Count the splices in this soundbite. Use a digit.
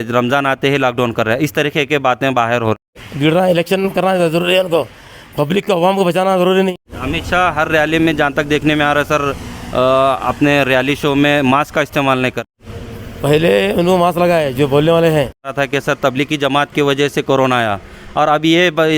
4